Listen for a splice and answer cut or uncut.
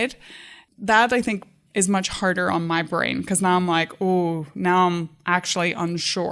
cut